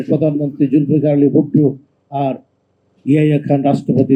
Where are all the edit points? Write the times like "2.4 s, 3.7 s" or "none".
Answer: none